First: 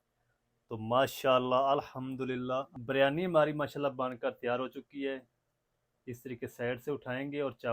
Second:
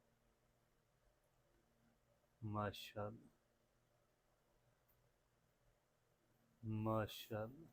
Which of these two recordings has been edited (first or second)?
first